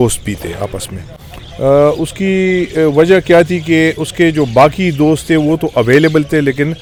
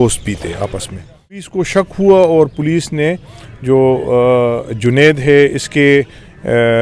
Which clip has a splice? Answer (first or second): second